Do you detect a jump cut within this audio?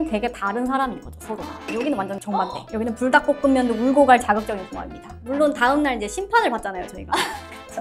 yes; 1 cut; at 1.6 s

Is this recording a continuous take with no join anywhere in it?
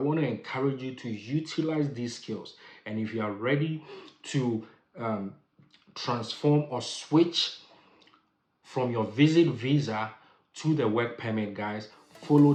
yes; 0 cuts

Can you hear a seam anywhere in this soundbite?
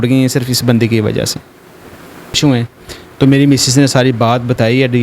yes; 1 cut; at 2.4 s

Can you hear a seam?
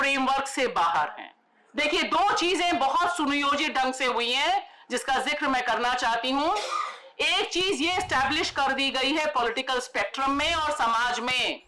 no; 0 cuts

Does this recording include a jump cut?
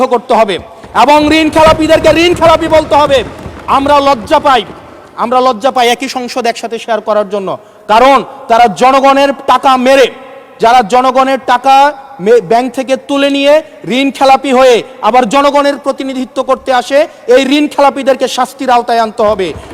no; 0 cuts

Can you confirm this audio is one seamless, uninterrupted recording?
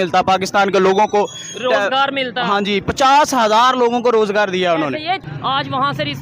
no; 1 cut; at 5.2 s

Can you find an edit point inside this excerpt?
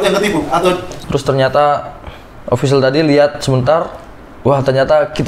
yes; 1 cut; at 1.0 s

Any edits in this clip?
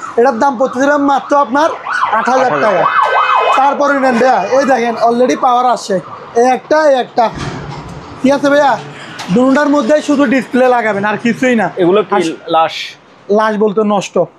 no; 0 cuts

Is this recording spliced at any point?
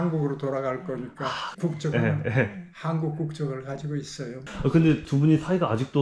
no; 0 cuts

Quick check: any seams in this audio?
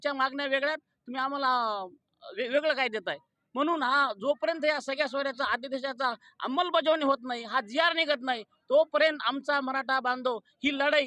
no; 0 cuts

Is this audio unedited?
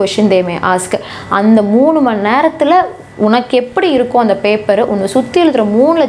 yes; 0 cuts

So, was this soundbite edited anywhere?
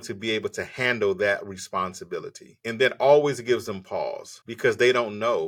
no; 0 cuts

